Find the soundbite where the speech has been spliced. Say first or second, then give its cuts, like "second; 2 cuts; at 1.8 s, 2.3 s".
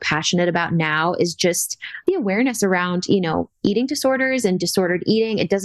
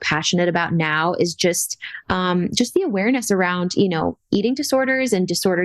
first; 1 cut; at 2.0 s